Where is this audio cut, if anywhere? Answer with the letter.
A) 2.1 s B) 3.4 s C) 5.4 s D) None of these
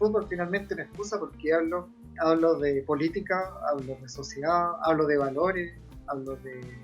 A